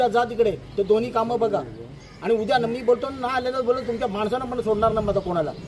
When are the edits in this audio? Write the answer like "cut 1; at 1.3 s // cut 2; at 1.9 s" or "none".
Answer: none